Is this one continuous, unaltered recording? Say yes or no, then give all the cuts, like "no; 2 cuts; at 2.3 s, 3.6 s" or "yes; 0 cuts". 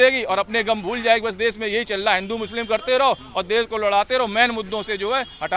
yes; 0 cuts